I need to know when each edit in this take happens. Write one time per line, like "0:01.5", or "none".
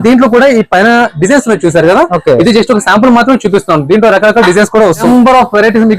0:05.0